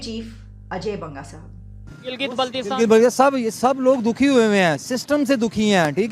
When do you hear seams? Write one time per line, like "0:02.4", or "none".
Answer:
0:02.0